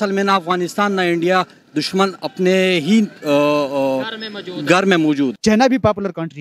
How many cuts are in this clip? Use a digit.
1